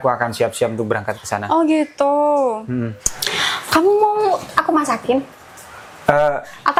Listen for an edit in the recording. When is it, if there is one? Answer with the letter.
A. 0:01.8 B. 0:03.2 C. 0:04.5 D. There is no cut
D